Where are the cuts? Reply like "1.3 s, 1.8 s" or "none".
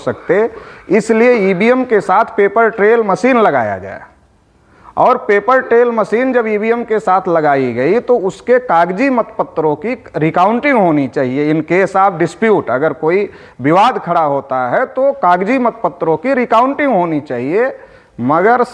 none